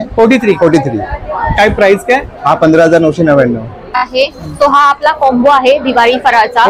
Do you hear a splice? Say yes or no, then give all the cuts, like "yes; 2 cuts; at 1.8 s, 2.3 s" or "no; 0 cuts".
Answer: yes; 1 cut; at 4.0 s